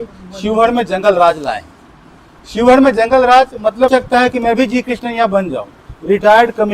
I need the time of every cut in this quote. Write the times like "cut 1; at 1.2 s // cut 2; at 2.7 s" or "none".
cut 1; at 3.9 s